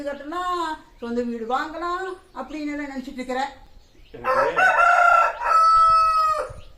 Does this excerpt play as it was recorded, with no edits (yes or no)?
yes